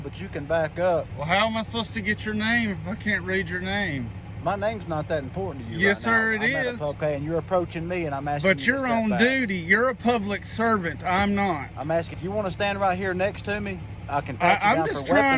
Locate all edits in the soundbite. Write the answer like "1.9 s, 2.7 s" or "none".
1.1 s, 7.0 s, 12.1 s